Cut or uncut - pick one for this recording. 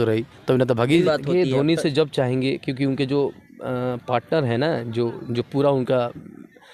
cut